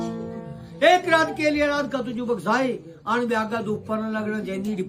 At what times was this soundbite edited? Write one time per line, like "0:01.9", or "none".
none